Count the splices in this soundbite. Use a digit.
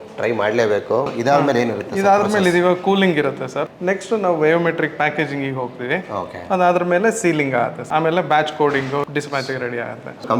0